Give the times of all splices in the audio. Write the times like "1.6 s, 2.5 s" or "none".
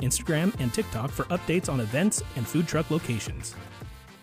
none